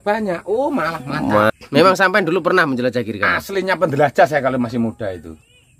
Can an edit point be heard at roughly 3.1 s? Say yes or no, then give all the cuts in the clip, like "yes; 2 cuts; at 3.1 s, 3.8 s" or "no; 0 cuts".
no; 1 cut; at 1.5 s